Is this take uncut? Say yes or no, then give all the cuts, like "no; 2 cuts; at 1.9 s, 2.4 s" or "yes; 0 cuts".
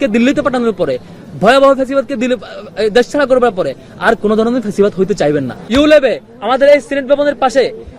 no; 1 cut; at 5.6 s